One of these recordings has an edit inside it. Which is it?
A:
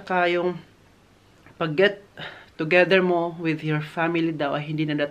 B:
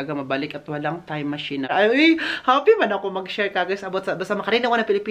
B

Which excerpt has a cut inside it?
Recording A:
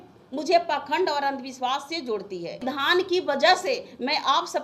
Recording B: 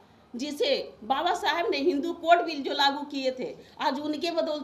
A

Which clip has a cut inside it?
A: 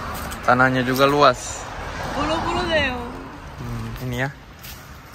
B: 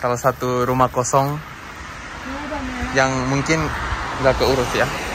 A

